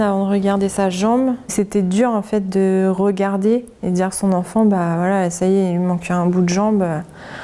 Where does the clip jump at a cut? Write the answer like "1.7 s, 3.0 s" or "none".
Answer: none